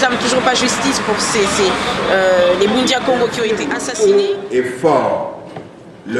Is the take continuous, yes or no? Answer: no